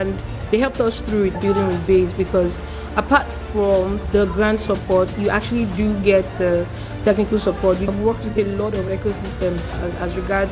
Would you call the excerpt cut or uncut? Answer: cut